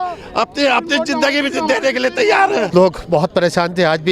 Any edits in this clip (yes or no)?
yes